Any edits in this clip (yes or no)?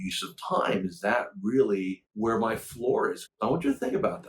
yes